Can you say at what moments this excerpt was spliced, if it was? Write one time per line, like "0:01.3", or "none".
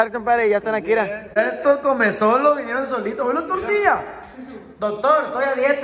0:01.3